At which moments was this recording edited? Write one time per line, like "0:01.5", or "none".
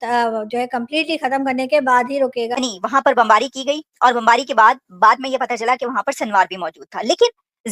0:02.6